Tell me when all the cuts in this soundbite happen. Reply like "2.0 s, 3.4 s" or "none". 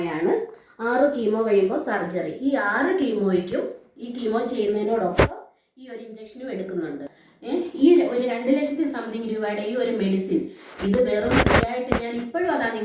7.2 s